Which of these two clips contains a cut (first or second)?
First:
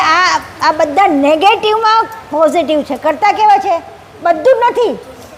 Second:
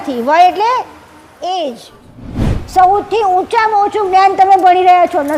second